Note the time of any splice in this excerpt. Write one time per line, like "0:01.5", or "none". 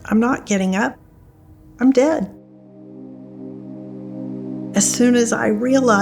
0:02.4
0:04.7